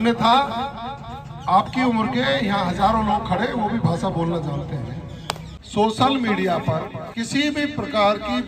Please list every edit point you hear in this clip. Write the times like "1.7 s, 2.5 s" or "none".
5.5 s, 7.0 s